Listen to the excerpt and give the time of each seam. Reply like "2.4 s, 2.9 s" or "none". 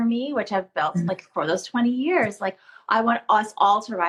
none